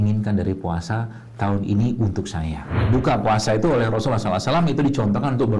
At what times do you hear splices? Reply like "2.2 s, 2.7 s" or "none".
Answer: 2.8 s